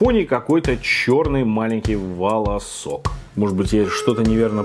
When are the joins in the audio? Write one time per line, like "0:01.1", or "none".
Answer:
0:03.2